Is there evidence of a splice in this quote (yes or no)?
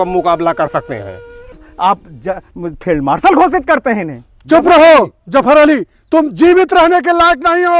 yes